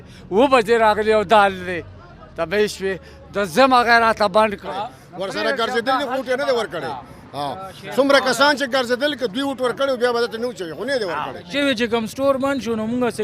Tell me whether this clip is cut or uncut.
cut